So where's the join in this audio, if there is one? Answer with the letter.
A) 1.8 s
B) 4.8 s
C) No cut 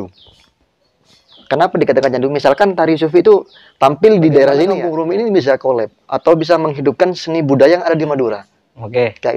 B